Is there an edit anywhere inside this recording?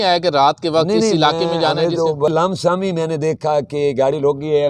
yes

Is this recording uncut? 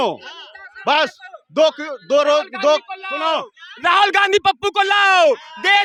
yes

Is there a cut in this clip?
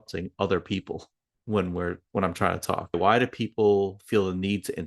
yes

